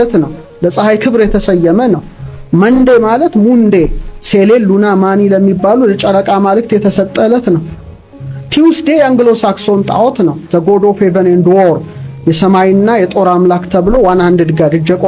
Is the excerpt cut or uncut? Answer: uncut